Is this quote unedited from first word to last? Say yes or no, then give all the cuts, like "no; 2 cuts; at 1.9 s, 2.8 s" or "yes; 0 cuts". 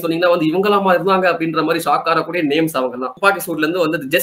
no; 1 cut; at 3.1 s